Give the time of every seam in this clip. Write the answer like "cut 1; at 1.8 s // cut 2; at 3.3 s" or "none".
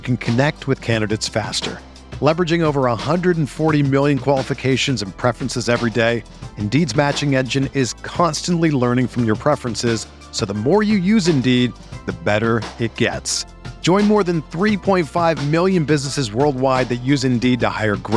none